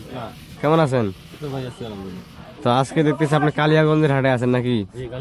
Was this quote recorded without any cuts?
yes; 0 cuts

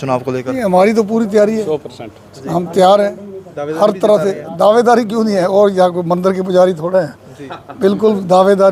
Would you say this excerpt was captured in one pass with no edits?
yes; 0 cuts

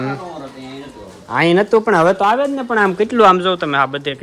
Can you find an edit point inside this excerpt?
no; 0 cuts

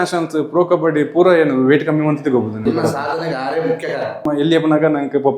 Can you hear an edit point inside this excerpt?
yes; 2 cuts; at 2.6 s, 4.2 s

